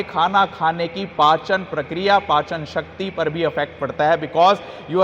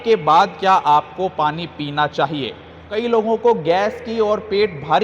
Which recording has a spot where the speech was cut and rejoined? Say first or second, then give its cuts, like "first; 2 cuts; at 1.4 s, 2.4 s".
second; 1 cut; at 3.1 s